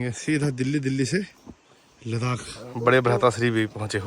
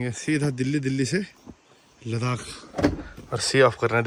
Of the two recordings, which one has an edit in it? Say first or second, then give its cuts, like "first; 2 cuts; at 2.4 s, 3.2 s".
first; 1 cut; at 2.6 s